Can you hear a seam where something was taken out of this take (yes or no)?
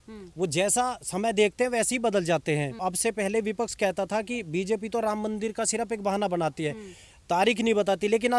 yes